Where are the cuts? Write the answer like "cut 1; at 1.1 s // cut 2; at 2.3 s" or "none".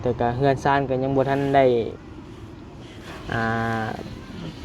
none